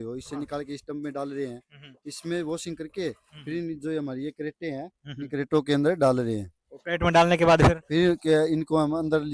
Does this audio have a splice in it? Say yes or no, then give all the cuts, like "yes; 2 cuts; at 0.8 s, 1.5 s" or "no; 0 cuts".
no; 0 cuts